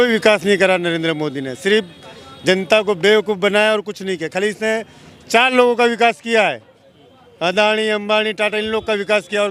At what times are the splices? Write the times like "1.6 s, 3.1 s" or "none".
none